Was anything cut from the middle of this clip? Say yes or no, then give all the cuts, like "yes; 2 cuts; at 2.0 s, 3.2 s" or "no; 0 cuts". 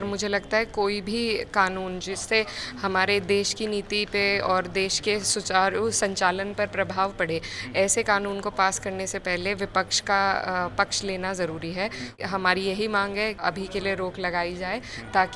yes; 2 cuts; at 12.2 s, 13.4 s